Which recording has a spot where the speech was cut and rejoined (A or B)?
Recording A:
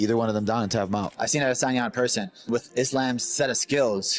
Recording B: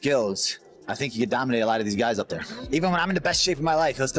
A